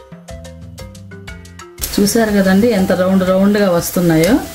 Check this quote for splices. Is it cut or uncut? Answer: cut